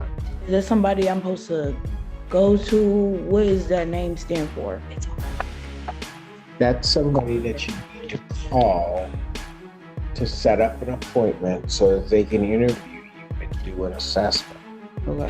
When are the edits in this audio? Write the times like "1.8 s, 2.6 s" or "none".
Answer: none